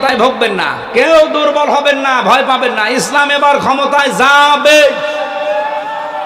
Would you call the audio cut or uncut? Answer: uncut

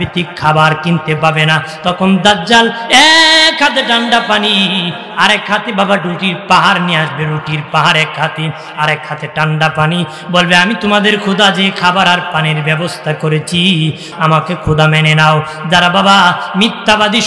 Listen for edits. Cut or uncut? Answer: cut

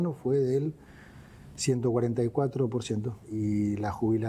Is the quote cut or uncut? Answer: cut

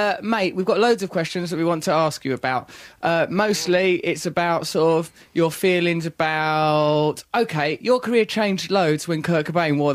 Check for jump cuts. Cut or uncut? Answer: uncut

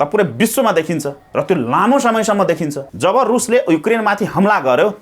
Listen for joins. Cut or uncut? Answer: cut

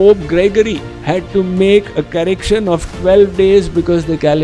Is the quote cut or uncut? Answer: uncut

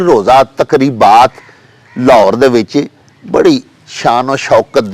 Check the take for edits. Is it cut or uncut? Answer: uncut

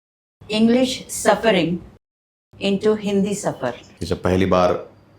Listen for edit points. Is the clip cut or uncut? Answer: cut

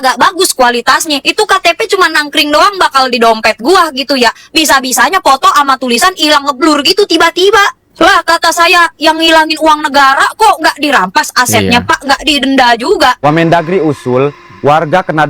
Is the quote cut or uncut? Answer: cut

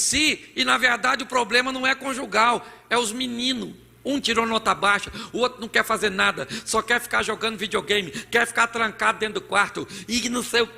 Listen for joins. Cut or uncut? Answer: uncut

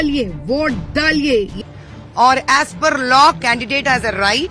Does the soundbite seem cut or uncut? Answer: cut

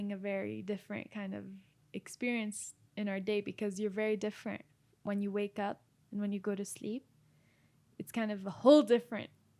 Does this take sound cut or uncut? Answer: uncut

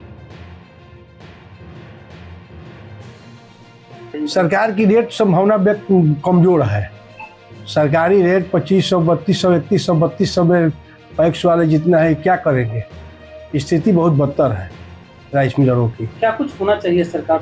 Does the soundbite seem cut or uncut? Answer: uncut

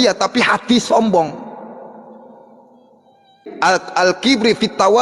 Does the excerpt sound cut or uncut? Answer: cut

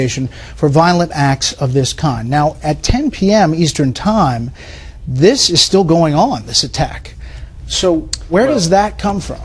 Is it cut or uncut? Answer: uncut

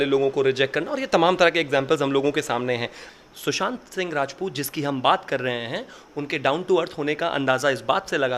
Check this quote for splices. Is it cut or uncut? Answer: cut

